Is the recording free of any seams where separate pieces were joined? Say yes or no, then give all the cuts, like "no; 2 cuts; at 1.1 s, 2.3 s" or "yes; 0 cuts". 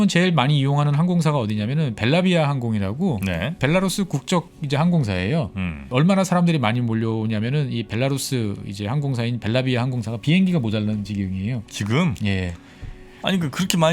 no; 2 cuts; at 4.6 s, 5.9 s